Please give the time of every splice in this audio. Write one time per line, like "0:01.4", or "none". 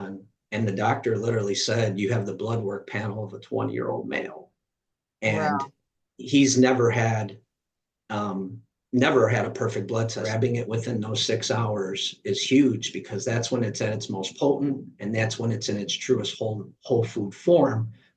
0:10.2